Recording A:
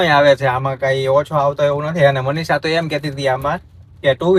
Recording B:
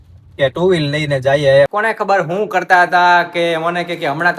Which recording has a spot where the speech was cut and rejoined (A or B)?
B